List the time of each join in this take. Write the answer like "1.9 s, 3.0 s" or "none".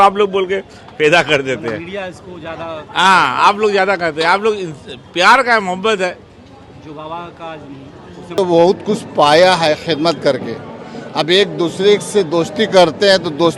8.4 s